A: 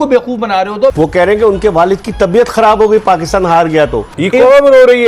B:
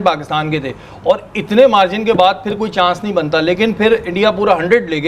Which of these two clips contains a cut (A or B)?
A